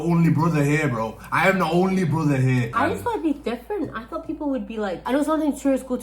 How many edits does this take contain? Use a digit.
2